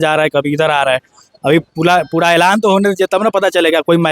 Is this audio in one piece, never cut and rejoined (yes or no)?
yes